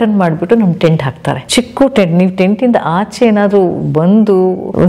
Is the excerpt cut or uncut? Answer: uncut